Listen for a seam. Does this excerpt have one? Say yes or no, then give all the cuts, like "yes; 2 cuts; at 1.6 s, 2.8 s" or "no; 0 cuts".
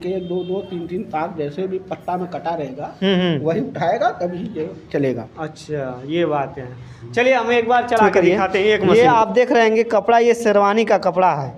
yes; 1 cut; at 8.9 s